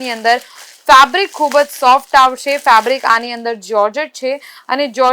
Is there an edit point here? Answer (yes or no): no